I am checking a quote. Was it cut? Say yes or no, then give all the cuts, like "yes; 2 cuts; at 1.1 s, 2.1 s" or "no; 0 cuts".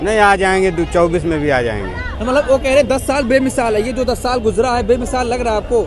no; 0 cuts